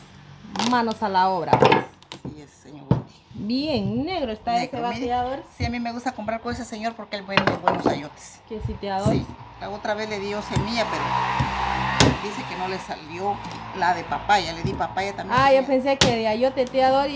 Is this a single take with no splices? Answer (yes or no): yes